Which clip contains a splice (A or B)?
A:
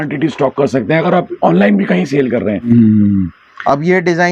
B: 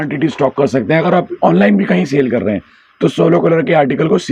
A